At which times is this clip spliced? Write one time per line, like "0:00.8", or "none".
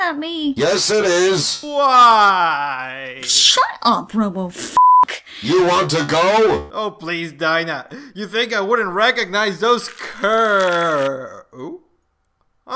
0:10.7